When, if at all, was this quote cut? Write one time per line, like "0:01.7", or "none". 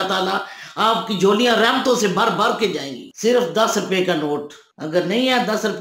0:03.0

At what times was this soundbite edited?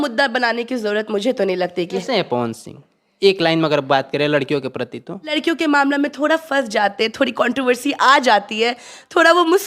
0:02.0
0:05.4

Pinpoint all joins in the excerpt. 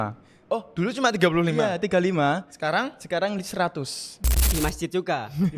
0:04.5

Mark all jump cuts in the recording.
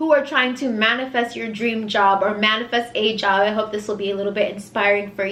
none

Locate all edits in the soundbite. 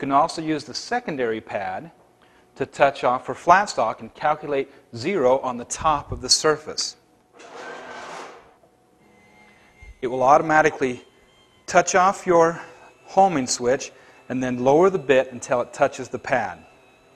0:02.7

